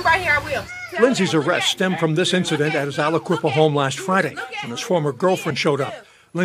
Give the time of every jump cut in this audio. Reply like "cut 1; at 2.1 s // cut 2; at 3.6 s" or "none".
none